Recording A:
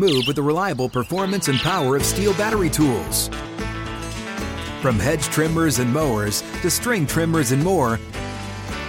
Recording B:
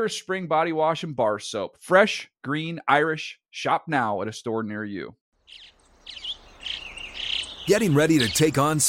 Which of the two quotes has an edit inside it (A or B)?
B